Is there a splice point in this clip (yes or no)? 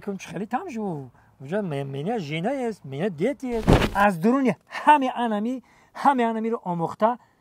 yes